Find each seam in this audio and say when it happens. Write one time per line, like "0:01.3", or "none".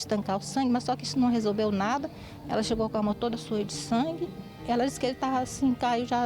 0:04.5